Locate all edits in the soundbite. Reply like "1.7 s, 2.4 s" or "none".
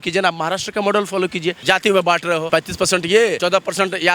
1.6 s, 2.4 s, 3.4 s